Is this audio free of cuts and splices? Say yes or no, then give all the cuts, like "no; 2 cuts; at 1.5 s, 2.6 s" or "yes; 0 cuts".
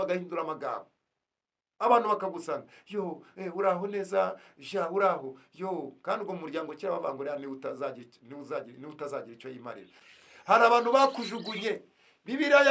no; 1 cut; at 10.0 s